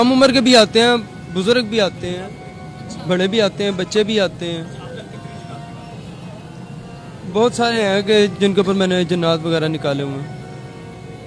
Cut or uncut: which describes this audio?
uncut